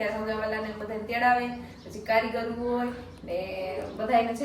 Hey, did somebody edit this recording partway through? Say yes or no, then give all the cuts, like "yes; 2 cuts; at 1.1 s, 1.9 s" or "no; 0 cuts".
no; 0 cuts